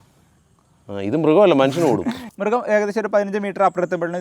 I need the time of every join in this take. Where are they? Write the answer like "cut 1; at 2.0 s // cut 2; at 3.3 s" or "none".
cut 1; at 2.3 s